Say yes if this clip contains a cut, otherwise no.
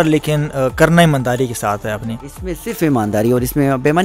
no